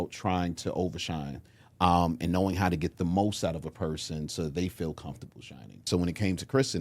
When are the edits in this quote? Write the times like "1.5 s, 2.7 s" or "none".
5.8 s